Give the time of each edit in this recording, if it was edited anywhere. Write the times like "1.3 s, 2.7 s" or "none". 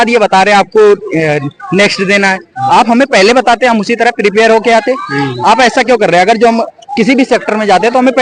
none